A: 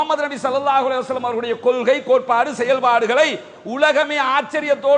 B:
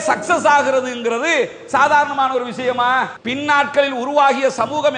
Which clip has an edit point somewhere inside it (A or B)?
B